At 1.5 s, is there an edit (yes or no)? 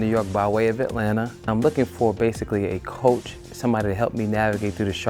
yes